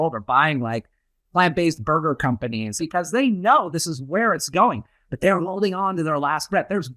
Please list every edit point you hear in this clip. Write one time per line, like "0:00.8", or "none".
0:02.7